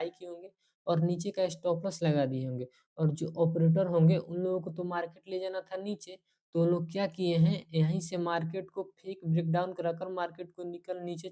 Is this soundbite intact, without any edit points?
yes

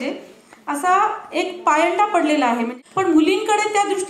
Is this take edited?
yes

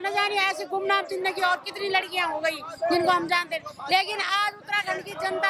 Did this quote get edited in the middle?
no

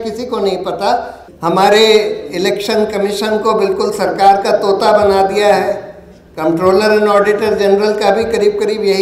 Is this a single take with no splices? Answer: no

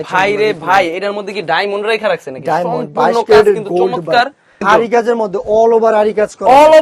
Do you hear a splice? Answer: yes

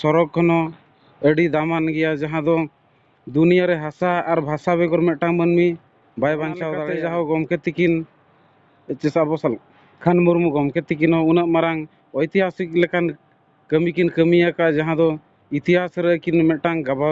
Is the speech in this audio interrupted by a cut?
yes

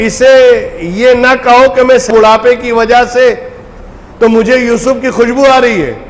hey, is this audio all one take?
no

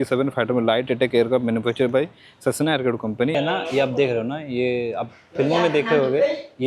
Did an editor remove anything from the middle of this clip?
yes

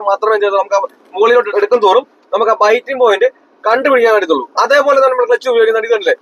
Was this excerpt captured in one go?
no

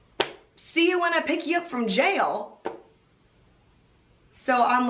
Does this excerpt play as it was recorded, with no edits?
yes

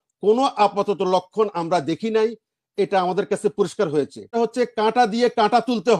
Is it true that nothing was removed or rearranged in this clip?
no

